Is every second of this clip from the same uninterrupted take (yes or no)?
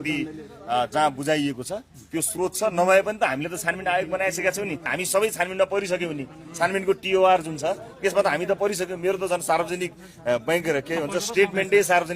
no